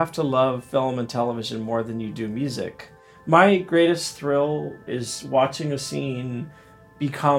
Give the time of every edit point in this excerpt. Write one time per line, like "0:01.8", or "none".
0:02.7
0:04.8